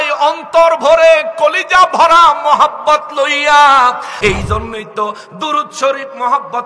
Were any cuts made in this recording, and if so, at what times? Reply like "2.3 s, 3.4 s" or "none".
4.1 s